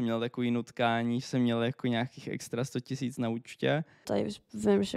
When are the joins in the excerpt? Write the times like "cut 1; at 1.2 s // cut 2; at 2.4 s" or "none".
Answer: cut 1; at 4.0 s